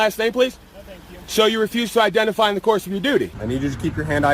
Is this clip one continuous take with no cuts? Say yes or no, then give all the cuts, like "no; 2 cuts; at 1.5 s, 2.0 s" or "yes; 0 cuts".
no; 1 cut; at 3.4 s